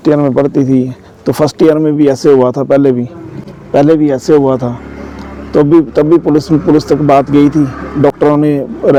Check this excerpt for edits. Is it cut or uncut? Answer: uncut